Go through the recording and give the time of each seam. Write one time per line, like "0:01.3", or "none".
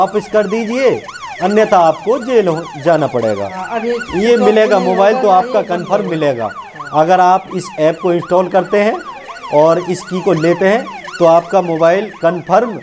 none